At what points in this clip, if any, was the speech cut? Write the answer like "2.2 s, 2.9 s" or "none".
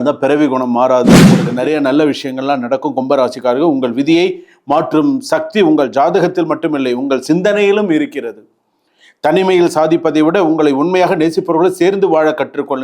1.5 s